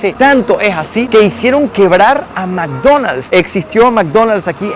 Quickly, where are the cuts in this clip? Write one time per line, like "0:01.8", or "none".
none